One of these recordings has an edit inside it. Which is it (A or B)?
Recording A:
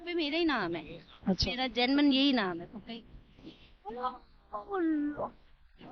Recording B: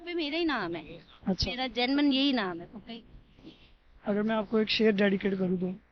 A